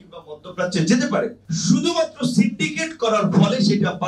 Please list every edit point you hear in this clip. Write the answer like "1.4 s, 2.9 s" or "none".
1.4 s